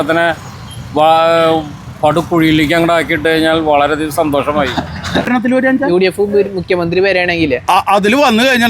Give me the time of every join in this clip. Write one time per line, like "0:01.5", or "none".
0:05.3